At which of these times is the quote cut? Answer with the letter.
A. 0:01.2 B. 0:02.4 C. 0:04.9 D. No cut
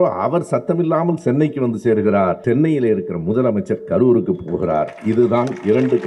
B